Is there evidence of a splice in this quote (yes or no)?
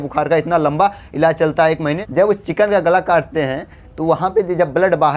yes